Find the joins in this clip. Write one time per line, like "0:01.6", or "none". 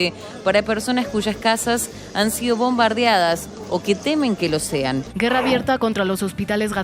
0:05.1